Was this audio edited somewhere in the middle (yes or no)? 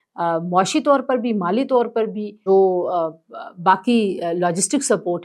yes